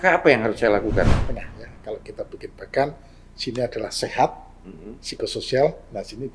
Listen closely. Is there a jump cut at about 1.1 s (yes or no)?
yes